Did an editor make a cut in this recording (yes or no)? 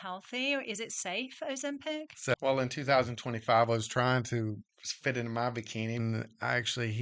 yes